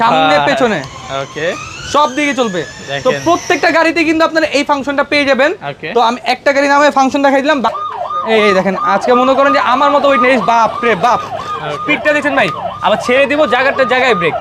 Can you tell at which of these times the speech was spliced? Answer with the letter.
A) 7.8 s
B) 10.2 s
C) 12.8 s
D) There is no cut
A